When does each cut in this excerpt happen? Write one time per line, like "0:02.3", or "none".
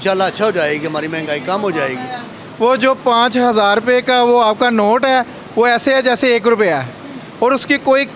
none